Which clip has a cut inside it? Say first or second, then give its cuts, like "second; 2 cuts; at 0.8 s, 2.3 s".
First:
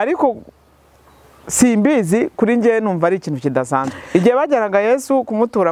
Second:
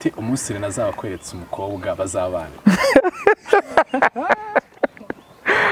first; 1 cut; at 4.0 s